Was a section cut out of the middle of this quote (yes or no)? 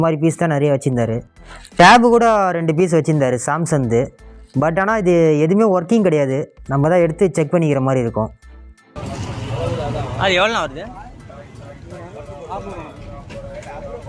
no